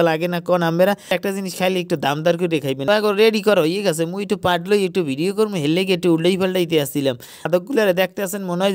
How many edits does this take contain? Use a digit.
3